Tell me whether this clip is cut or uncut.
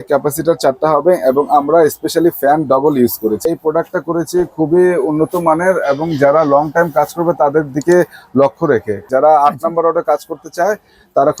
cut